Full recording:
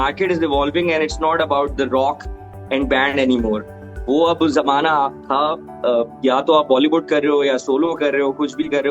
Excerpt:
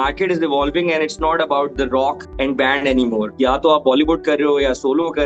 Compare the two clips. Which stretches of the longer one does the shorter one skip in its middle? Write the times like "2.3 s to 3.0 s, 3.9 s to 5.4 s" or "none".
2.3 s to 2.6 s, 3.6 s to 6.1 s

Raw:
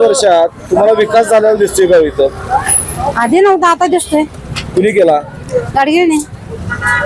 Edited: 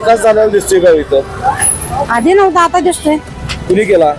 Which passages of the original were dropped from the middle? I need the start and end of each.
none

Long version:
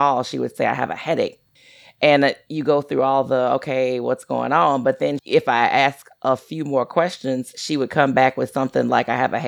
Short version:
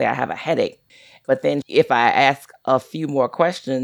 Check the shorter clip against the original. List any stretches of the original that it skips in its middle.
1.9 s to 4.8 s

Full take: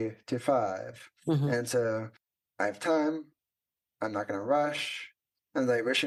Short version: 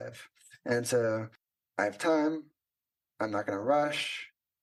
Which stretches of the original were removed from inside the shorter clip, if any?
none

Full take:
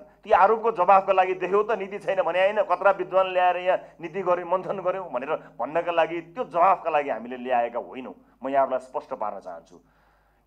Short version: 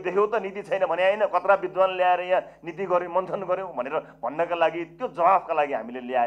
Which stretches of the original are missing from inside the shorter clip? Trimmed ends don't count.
none

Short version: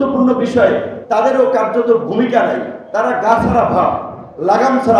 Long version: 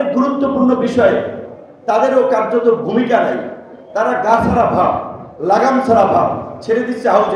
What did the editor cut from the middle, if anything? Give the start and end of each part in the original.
1.4 s to 1.7 s, 3.5 s to 3.8 s

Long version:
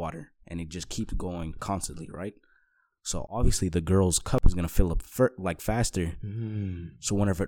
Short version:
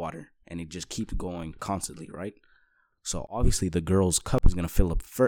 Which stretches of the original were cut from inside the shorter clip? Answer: none

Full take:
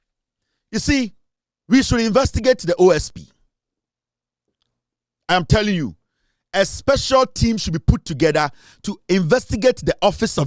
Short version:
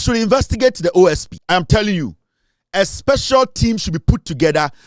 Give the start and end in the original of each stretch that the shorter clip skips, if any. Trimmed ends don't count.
3.2 s to 5.1 s

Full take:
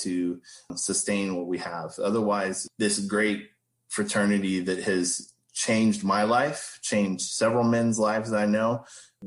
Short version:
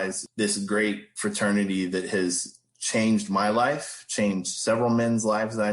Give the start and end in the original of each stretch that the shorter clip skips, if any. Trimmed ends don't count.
3.5 s to 3.8 s

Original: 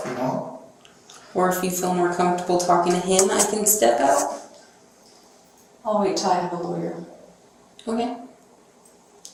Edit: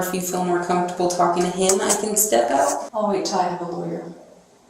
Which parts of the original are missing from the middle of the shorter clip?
4.4 s to 5.8 s

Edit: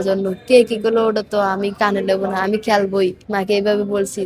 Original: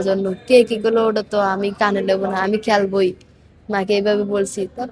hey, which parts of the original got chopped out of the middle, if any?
3.2 s to 3.6 s

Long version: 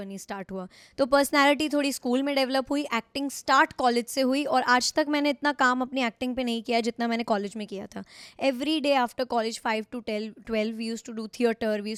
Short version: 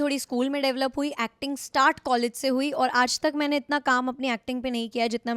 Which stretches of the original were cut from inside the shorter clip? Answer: none

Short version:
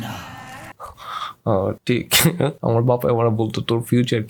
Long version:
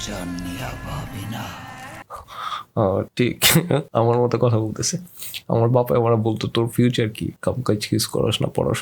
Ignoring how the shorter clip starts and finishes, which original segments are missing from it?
3.9 s to 5.4 s

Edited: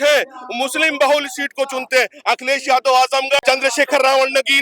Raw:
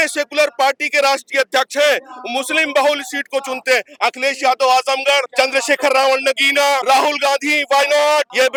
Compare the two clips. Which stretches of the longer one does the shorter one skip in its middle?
5.2 s to 5.3 s

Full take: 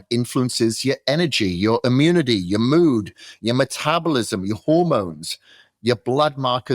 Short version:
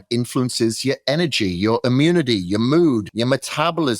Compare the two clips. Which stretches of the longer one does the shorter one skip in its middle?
3.1 s to 3.4 s

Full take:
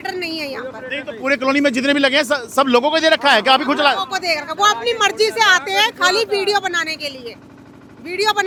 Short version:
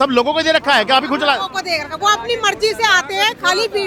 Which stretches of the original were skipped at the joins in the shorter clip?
none

